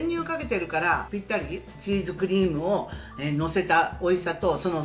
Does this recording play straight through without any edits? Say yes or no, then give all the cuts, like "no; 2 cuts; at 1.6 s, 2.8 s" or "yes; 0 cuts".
no; 1 cut; at 1.6 s